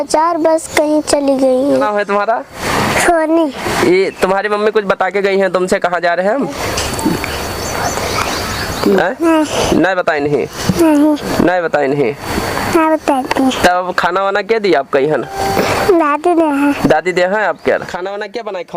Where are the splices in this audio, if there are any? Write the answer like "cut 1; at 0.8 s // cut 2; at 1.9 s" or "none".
cut 1; at 1.9 s // cut 2; at 17.9 s